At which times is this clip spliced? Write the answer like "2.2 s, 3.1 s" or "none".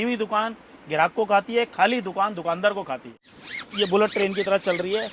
3.1 s